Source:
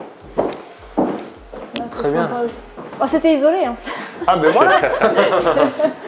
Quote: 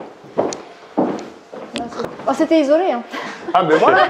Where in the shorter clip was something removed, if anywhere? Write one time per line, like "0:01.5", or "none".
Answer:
0:02.0

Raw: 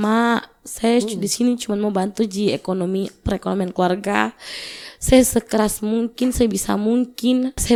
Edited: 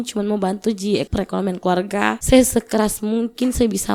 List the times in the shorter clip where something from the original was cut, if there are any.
0:01.1
0:02.2

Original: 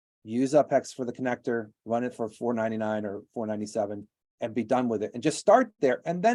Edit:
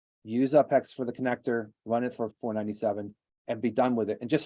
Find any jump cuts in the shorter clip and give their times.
0:02.3

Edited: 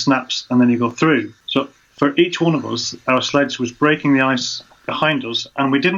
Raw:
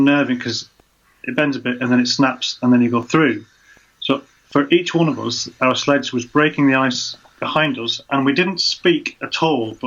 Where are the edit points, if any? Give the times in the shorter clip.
0:01.4

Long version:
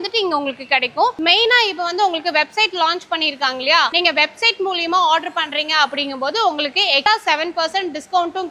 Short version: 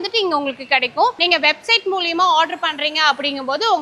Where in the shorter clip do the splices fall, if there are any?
0:01.2

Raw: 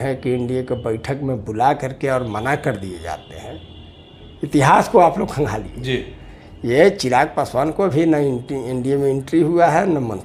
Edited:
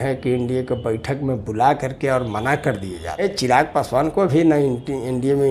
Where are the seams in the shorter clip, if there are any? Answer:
0:03.2

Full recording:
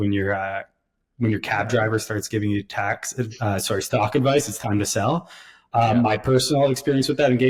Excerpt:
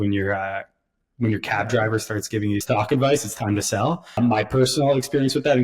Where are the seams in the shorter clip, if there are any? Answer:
0:02.6
0:04.2

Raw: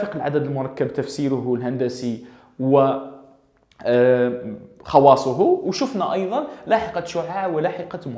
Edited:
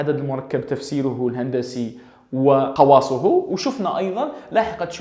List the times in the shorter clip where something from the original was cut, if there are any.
0:02.7

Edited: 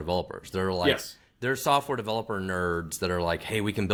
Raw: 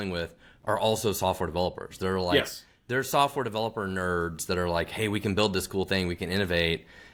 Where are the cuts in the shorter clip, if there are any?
none

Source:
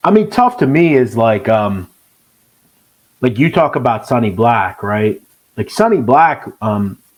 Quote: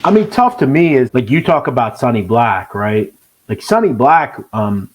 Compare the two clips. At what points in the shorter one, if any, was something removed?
0:01.1

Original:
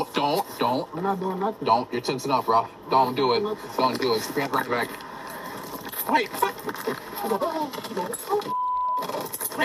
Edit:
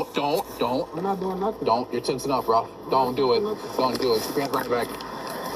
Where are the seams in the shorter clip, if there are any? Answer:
none

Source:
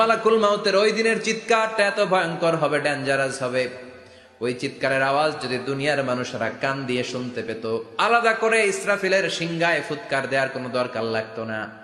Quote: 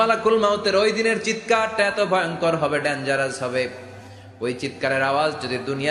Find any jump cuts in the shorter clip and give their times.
none

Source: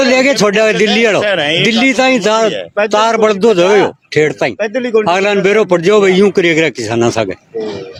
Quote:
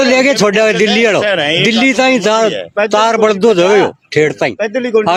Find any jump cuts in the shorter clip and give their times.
none

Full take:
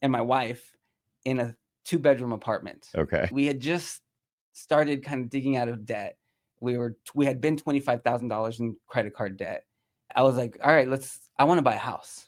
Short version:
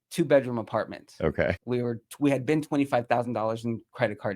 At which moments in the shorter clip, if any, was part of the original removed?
0:01.6

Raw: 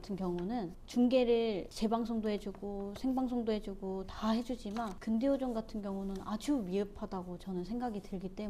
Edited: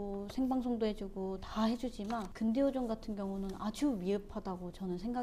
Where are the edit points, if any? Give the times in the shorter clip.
none

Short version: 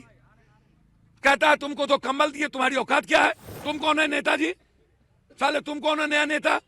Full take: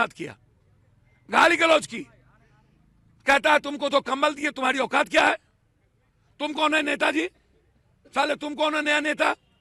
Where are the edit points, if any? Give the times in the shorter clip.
0:03.5

